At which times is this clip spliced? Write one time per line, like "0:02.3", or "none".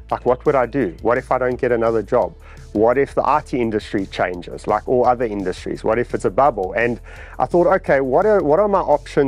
none